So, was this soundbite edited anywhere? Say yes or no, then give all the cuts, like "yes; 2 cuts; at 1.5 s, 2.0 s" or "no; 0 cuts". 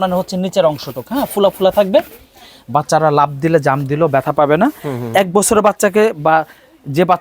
no; 0 cuts